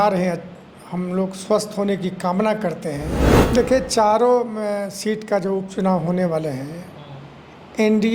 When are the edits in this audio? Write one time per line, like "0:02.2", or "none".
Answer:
0:03.3